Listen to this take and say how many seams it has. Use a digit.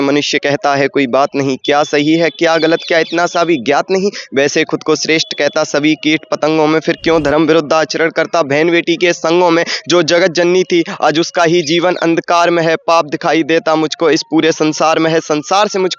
0